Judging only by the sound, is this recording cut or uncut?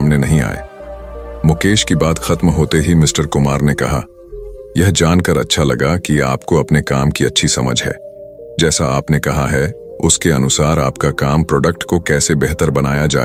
uncut